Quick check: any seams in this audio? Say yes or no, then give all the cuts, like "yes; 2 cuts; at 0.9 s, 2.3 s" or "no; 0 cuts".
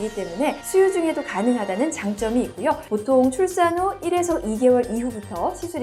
no; 0 cuts